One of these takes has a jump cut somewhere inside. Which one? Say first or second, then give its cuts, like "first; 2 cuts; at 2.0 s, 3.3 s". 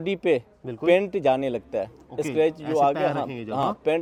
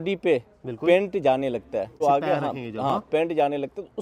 second; 1 cut; at 1.9 s